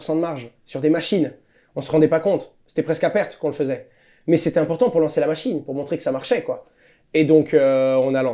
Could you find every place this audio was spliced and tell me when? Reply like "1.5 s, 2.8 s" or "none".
none